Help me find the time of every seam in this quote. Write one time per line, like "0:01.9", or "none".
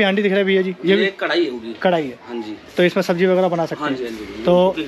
none